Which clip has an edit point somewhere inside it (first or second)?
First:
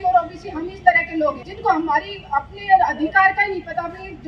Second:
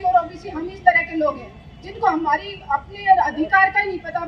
first